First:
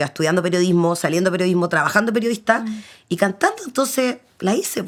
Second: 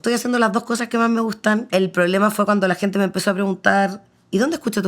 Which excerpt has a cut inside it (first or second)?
second